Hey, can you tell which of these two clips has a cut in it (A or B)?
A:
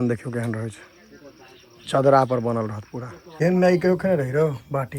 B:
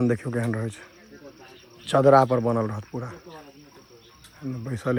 A